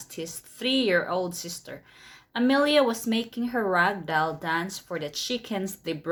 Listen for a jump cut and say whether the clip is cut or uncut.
uncut